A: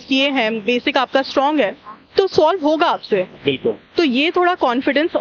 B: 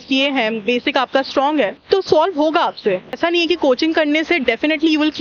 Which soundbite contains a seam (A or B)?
B